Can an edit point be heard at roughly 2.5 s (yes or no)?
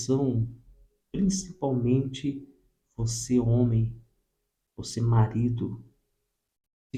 no